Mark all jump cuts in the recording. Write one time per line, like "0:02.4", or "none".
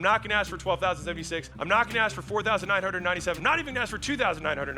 0:01.5
0:03.4